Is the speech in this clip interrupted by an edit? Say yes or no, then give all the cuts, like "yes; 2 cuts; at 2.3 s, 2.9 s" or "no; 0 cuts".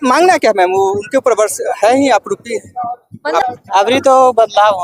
yes; 1 cut; at 3.4 s